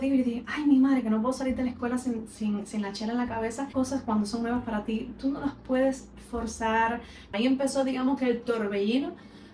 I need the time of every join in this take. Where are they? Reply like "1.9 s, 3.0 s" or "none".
3.7 s, 7.3 s